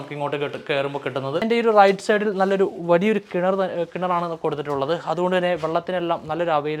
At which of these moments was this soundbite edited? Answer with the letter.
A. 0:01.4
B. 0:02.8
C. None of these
A